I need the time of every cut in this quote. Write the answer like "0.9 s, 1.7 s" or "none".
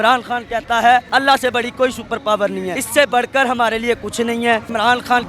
none

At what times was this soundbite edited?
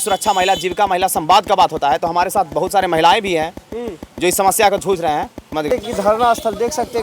5.7 s

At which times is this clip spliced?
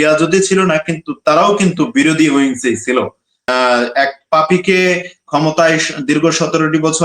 3.4 s

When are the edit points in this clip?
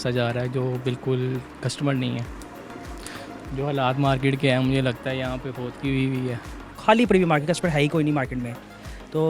6.7 s

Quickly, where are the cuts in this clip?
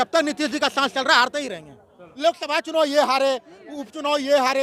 2.1 s

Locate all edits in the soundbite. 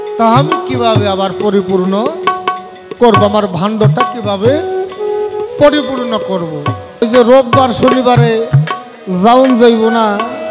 7.0 s

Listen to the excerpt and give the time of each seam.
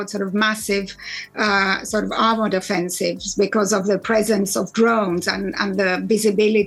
none

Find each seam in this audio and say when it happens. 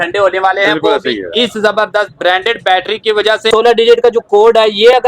3.5 s

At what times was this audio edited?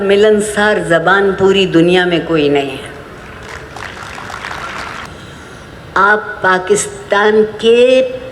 5.0 s

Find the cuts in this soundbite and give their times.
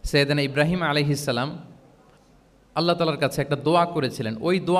none

